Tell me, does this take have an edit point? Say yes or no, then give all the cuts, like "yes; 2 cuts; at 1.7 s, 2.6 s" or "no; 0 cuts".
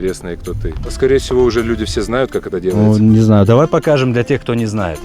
yes; 1 cut; at 0.9 s